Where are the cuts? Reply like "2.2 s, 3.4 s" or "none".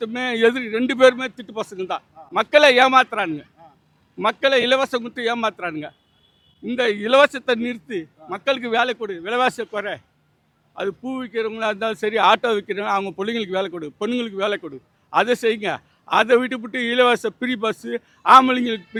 none